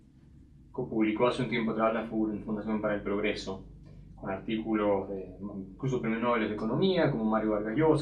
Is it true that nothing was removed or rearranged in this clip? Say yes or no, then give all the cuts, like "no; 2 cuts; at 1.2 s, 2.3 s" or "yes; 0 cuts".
no; 1 cut; at 2.4 s